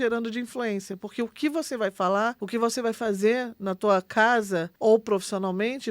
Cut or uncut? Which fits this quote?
cut